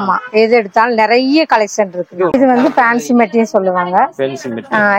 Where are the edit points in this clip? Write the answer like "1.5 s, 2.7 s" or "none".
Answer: 2.3 s